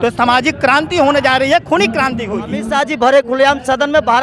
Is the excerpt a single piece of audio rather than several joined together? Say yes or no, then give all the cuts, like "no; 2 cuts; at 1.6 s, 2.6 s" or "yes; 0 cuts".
no; 1 cut; at 2.7 s